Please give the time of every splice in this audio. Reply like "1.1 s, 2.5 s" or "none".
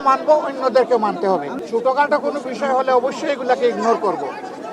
1.5 s